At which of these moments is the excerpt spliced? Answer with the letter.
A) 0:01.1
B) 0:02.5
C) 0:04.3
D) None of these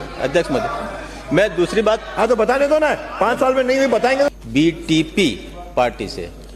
C